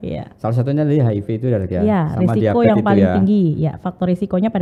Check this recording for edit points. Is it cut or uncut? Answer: uncut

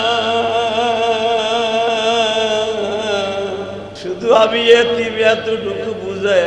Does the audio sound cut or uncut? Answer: cut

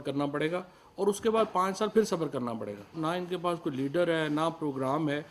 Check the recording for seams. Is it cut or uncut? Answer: cut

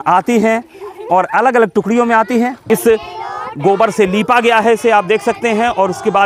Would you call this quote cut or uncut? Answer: cut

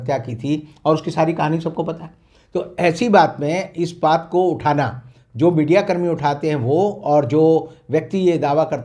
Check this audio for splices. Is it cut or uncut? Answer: uncut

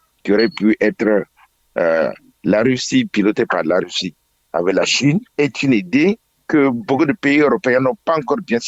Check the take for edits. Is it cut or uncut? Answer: cut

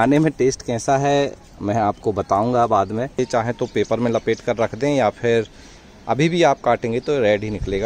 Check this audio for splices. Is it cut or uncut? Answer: cut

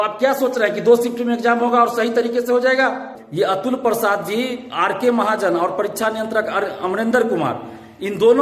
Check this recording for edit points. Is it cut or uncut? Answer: cut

